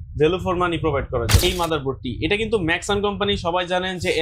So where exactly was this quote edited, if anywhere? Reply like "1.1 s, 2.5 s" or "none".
1.4 s